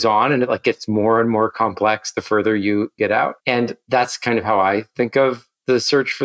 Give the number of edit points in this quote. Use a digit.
1